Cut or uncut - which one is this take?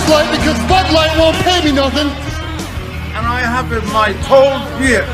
cut